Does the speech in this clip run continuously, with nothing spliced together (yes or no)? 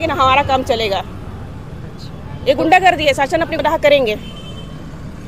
no